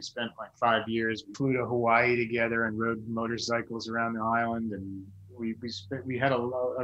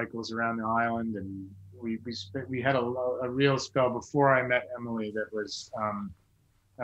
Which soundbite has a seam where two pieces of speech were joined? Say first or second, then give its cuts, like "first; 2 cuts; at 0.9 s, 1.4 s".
first; 1 cut; at 1.3 s